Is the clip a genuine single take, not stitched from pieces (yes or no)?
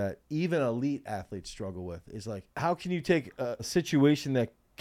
no